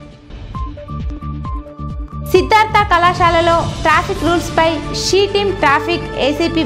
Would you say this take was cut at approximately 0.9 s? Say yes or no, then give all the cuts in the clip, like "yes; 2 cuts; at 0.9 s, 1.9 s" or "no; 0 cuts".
yes; 2 cuts; at 0.9 s, 2.2 s